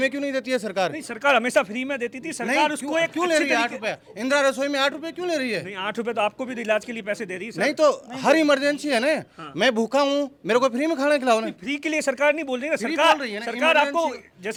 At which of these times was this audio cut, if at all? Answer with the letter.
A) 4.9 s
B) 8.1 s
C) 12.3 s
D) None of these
D